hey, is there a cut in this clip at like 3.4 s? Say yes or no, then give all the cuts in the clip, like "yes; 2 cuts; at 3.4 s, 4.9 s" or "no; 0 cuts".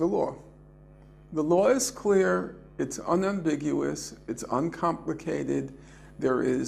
no; 1 cut; at 5.2 s